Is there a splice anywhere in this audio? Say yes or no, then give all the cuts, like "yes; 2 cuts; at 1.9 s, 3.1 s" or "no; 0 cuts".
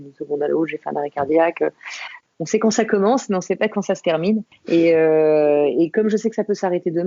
yes; 2 cuts; at 2.2 s, 4.5 s